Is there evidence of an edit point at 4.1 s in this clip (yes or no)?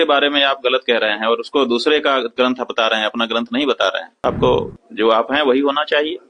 yes